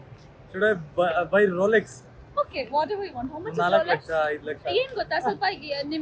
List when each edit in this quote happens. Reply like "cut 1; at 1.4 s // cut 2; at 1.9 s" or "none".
cut 1; at 2.1 s // cut 2; at 4.8 s